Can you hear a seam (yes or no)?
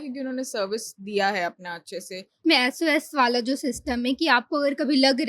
yes